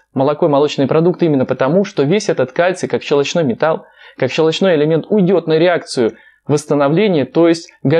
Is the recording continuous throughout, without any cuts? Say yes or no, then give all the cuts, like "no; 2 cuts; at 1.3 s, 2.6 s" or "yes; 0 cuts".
yes; 0 cuts